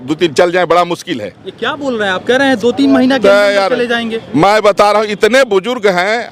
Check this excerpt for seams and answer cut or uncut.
uncut